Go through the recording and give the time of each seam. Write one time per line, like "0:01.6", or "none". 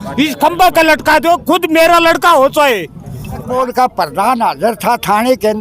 0:03.5